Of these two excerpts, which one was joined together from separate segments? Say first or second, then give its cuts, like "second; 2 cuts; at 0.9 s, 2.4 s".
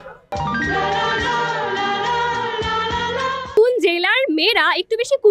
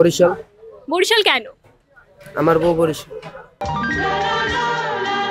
first; 1 cut; at 3.5 s